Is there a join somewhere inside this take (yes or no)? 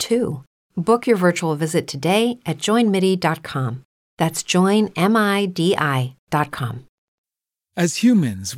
yes